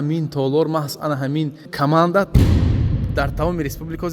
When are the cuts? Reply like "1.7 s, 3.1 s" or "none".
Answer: 1.6 s